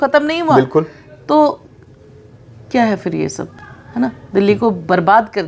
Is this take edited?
no; 0 cuts

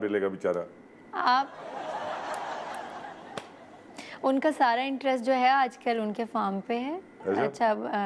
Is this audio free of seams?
yes; 0 cuts

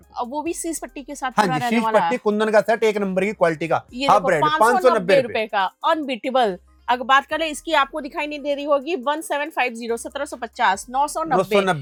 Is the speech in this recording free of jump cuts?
yes; 0 cuts

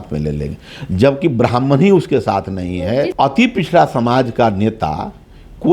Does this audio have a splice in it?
yes; 1 cut; at 3.1 s

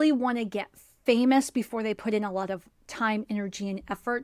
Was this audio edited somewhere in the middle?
yes; 1 cut; at 1.0 s

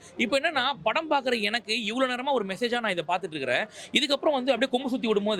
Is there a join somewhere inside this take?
no; 0 cuts

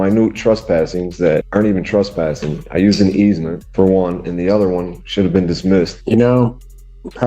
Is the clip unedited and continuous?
no; 3 cuts; at 1.5 s, 3.6 s, 6.0 s

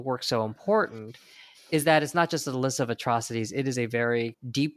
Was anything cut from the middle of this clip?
no; 0 cuts

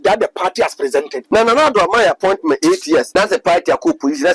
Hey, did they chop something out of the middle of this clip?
yes; 2 cuts; at 1.2 s, 3.1 s

